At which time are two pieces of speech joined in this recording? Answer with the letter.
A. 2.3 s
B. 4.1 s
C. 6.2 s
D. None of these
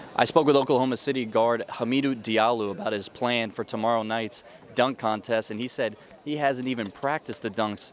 D